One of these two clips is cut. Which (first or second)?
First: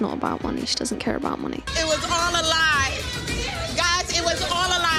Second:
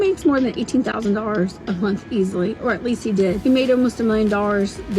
second